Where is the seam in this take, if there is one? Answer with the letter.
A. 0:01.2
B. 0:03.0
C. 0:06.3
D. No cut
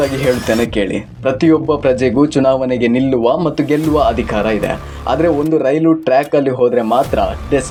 D